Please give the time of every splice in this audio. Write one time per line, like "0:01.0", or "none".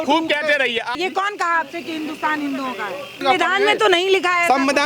0:01.0
0:03.2

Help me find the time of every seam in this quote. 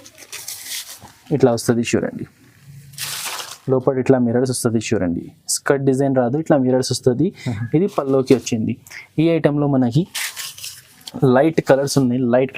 none

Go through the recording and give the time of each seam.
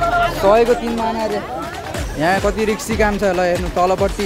0:01.9

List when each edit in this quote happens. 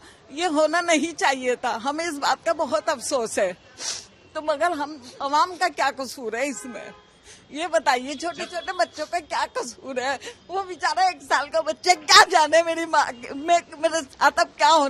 none

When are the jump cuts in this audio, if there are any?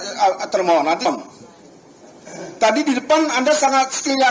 0:01.1

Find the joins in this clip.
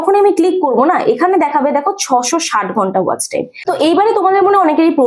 0:03.5

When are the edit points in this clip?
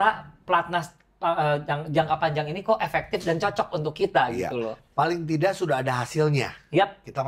none

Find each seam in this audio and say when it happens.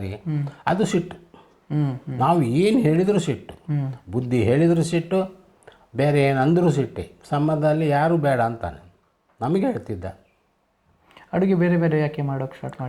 none

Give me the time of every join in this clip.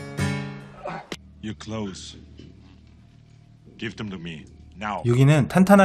none

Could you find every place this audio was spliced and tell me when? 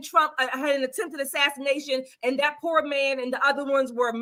none

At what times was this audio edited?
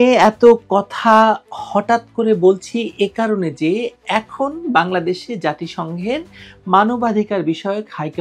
none

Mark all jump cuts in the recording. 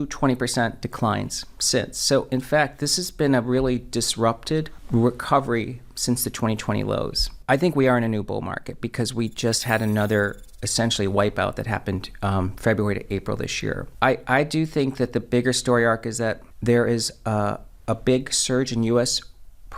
0:04.8
0:07.3
0:13.9
0:16.5

